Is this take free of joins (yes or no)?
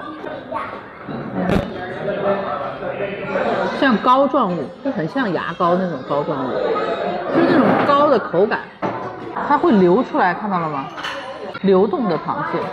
no